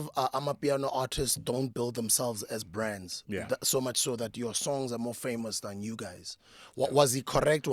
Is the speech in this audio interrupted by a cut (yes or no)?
no